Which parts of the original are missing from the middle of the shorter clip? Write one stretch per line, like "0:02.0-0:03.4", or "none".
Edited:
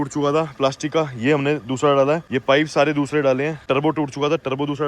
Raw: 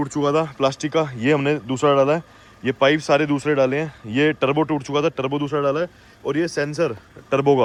0:02.3-0:02.6
0:04.0-0:04.4